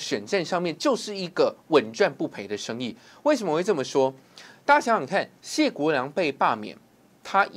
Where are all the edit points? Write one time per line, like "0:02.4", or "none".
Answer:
none